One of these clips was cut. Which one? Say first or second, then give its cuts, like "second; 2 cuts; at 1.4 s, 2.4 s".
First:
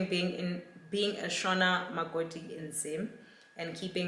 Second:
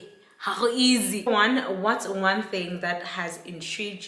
second; 1 cut; at 1.3 s